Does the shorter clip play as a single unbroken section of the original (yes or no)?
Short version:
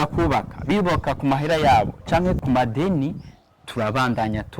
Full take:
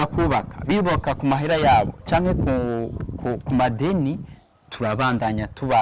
no